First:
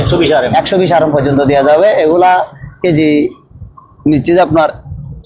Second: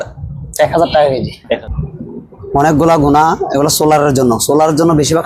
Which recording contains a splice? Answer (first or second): second